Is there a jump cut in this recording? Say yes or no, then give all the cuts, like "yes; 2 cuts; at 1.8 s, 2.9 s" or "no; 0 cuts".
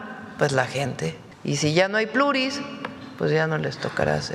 yes; 1 cut; at 1.3 s